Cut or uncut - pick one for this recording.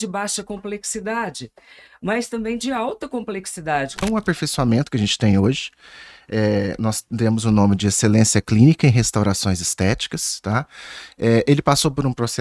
cut